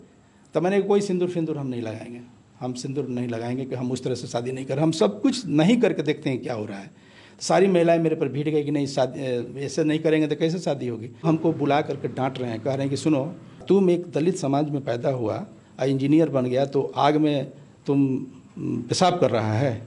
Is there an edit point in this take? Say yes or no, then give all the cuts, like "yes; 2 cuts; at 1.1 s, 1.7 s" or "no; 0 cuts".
yes; 2 cuts; at 11.3 s, 13.6 s